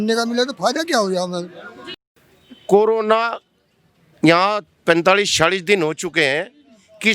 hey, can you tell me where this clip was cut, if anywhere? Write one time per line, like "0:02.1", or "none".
0:02.0